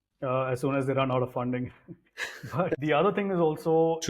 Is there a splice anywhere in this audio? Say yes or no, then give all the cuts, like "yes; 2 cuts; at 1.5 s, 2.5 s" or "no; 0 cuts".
yes; 1 cut; at 2.7 s